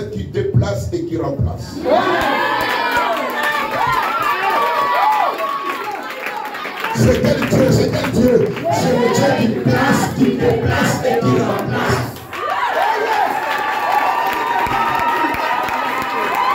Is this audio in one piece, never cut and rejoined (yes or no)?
yes